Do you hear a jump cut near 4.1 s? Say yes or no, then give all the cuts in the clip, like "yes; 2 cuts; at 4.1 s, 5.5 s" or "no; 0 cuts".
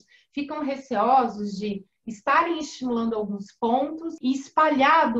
yes; 1 cut; at 4.1 s